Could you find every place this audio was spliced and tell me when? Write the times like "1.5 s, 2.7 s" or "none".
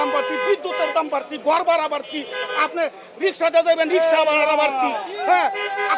none